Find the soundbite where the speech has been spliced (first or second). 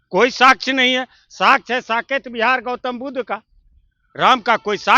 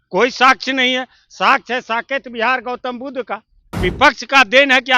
second